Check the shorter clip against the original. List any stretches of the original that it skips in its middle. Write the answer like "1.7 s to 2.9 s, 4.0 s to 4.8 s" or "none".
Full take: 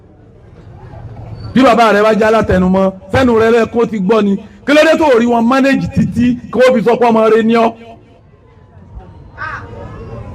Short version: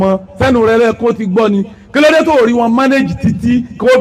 none

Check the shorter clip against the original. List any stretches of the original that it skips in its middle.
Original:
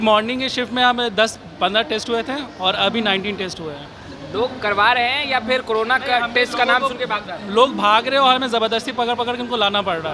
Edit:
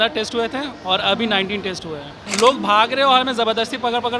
3.9 s to 7.3 s

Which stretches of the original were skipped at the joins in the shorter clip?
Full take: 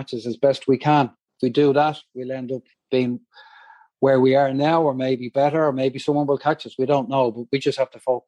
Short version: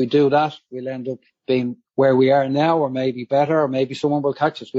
3.3 s to 3.9 s

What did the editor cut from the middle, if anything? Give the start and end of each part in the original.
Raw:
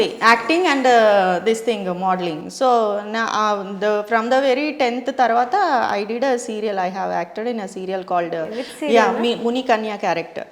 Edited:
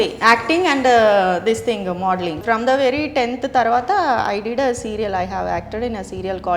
2.4 s to 4.0 s

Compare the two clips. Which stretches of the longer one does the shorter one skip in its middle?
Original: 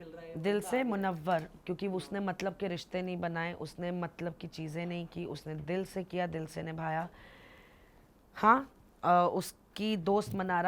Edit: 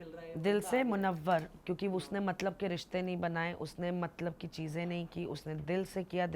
none

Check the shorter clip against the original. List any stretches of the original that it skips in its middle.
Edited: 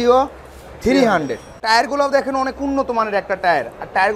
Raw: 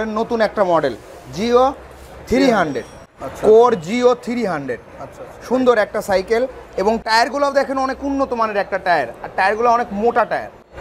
3.1 s to 7.0 s

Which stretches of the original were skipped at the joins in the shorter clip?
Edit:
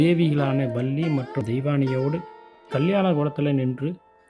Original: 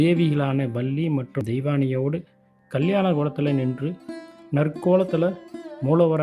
none

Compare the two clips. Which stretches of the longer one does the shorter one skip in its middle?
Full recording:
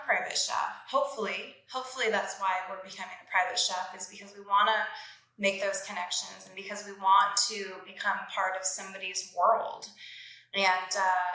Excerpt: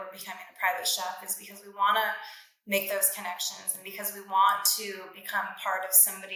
none

